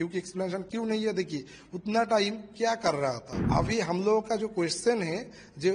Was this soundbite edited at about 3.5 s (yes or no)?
yes